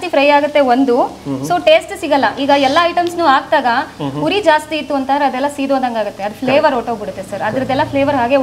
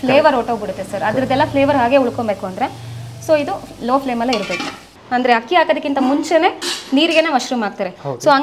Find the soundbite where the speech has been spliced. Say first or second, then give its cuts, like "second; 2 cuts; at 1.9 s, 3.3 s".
second; 1 cut; at 5.0 s